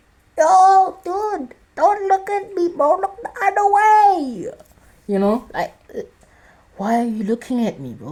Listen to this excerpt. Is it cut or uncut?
uncut